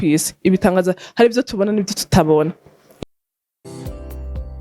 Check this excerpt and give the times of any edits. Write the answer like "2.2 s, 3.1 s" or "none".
2.9 s